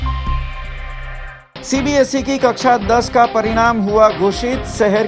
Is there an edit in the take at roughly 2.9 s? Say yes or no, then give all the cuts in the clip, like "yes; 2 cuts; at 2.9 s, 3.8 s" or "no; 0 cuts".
no; 1 cut; at 1.0 s